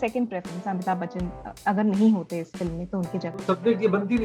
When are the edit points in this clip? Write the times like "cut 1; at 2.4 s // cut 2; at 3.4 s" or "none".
none

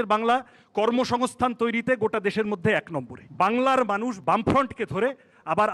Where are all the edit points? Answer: cut 1; at 3.2 s // cut 2; at 4.2 s

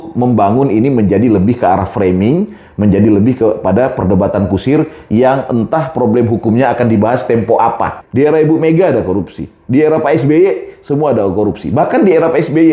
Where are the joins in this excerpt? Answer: cut 1; at 8.0 s

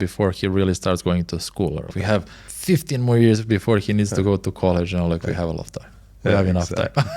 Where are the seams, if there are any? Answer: cut 1; at 2.0 s

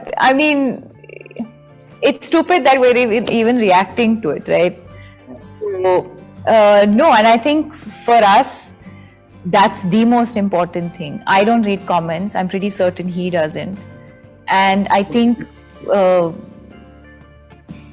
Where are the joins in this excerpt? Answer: none

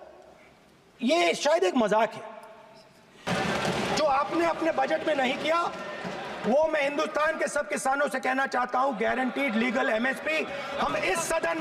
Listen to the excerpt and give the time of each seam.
cut 1; at 3.2 s

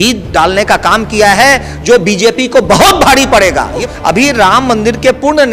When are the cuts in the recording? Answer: cut 1; at 3.8 s

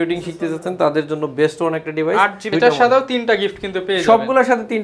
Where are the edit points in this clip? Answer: cut 1; at 2.4 s

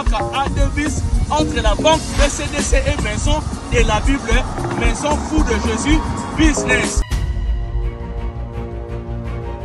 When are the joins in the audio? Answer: cut 1; at 7.0 s

